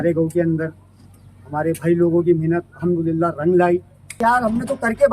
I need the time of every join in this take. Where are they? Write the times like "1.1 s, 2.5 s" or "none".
4.2 s